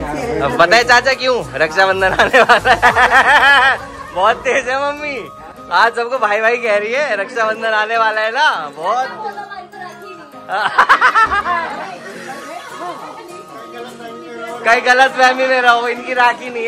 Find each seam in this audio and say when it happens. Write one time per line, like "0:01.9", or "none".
none